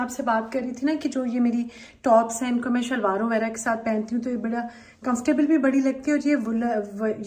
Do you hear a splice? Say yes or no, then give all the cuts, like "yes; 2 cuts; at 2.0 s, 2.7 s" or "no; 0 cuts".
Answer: no; 0 cuts